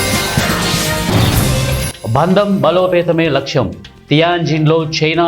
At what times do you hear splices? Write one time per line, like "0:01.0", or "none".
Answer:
0:01.7